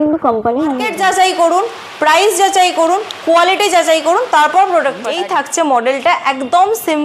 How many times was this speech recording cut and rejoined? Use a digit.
2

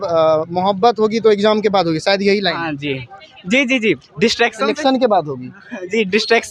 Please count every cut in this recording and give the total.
0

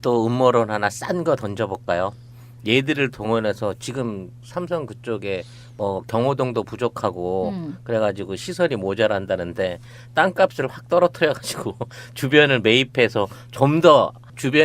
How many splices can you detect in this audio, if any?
1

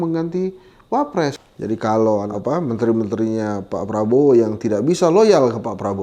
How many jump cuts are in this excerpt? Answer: 1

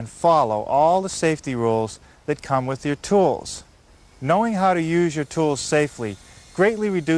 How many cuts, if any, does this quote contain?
0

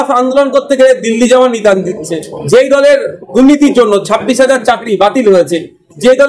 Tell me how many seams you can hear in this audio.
1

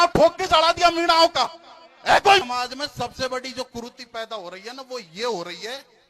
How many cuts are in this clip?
1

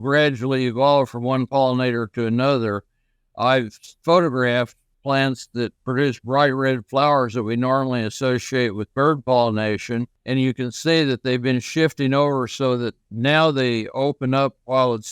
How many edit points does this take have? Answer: 3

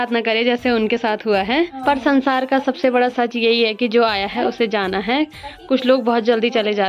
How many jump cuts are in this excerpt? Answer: 0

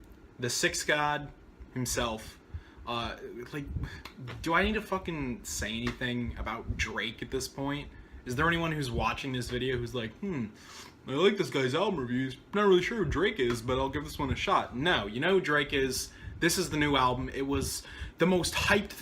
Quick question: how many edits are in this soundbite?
1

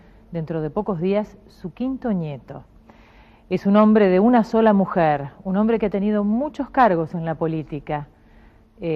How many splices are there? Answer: 0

